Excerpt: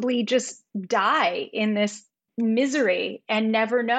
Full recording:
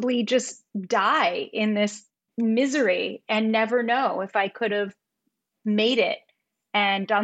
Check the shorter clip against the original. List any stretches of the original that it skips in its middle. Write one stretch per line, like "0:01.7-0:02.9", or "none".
none